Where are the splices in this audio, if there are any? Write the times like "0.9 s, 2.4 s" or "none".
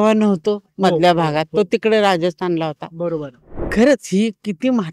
3.7 s